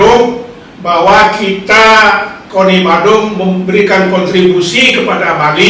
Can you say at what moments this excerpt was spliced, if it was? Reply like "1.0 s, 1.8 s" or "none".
none